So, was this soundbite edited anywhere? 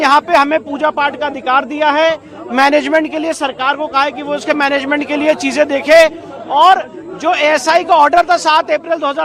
no; 0 cuts

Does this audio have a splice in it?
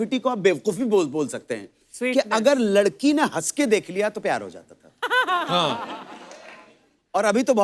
no; 0 cuts

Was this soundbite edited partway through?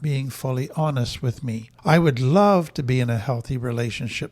yes; 1 cut; at 1.7 s

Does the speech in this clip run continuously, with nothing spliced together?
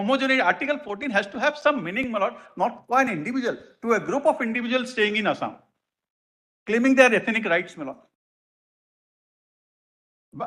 yes; 0 cuts

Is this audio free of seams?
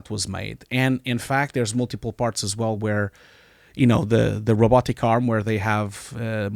yes; 0 cuts

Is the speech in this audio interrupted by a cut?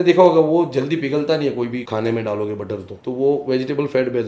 yes; 2 cuts; at 1.9 s, 2.9 s

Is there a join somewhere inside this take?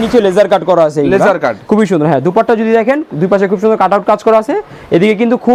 no; 0 cuts

